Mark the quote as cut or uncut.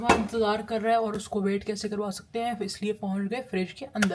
uncut